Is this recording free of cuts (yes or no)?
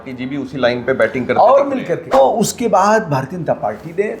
no